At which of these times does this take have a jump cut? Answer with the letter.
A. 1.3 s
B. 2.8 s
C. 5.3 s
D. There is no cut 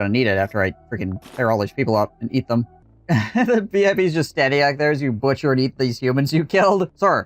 B